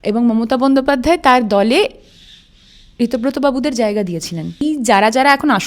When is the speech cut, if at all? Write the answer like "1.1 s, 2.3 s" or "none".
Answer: 4.6 s